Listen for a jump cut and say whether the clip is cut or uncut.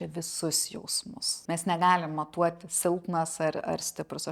cut